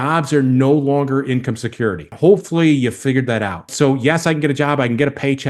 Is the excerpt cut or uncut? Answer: cut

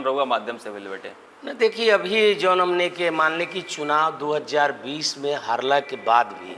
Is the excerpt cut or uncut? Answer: uncut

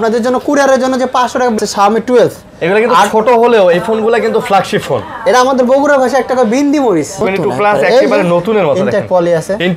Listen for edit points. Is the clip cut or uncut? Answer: cut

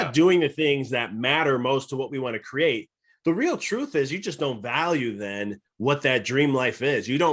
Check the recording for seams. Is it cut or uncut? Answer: uncut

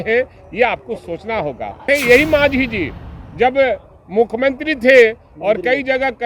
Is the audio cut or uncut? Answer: cut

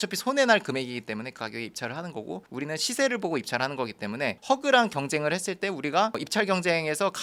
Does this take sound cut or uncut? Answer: uncut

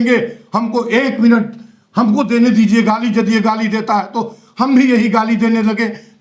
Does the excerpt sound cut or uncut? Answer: uncut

